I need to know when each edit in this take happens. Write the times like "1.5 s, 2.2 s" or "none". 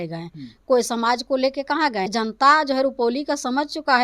2.1 s